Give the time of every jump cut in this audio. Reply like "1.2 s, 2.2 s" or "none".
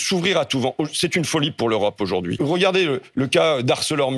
2.4 s